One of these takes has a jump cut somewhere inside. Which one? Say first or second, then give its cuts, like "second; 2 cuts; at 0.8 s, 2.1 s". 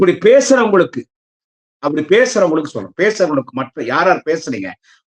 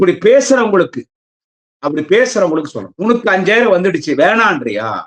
second; 1 cut; at 2.8 s